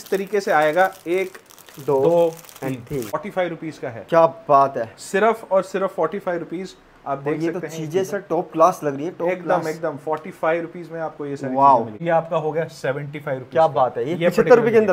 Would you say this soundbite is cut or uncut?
cut